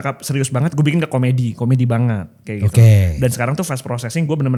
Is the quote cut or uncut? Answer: uncut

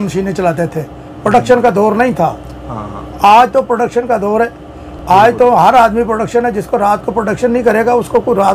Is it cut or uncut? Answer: uncut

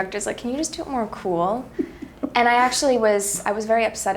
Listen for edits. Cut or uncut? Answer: uncut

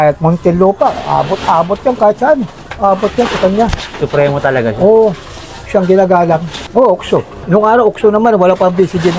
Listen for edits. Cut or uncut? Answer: uncut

